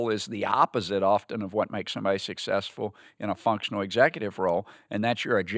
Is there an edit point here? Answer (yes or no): no